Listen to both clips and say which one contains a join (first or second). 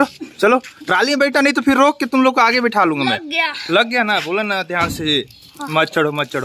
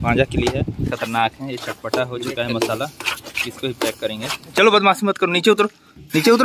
second